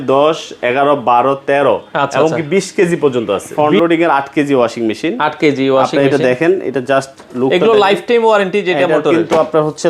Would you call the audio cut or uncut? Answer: cut